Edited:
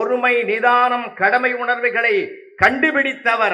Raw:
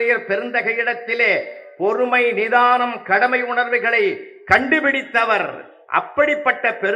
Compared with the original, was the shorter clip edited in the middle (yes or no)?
no